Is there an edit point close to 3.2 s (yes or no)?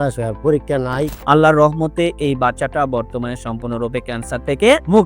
no